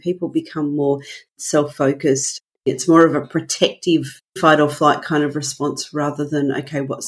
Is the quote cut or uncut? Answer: cut